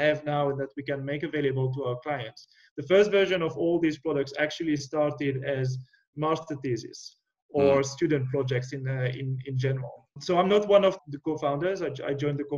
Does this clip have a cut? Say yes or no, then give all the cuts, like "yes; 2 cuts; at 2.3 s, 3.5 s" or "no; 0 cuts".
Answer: yes; 2 cuts; at 10.1 s, 11.0 s